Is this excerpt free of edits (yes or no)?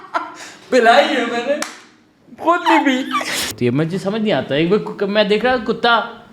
no